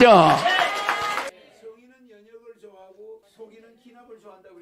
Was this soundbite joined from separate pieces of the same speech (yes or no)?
yes